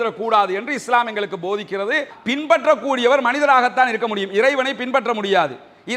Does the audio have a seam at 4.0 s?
no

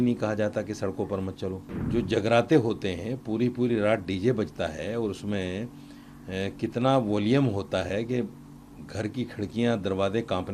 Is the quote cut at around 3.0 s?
no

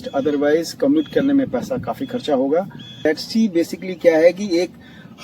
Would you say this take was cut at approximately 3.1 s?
yes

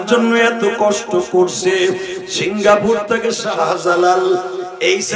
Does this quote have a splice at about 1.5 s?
no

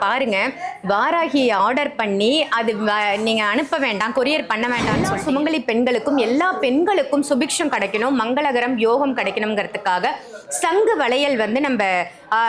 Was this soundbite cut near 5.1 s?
yes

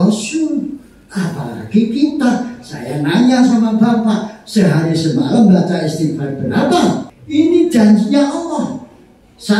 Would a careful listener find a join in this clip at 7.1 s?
yes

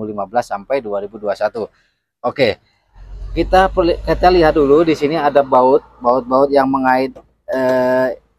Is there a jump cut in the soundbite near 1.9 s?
no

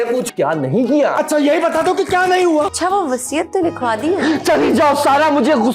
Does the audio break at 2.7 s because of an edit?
yes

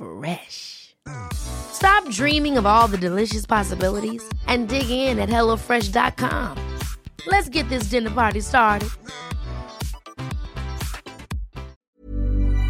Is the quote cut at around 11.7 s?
yes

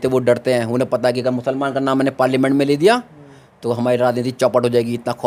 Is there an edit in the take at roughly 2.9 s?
no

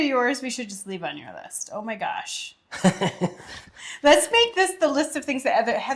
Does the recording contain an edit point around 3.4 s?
no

